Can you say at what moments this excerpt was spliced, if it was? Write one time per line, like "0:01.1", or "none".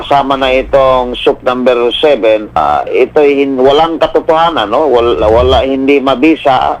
0:02.6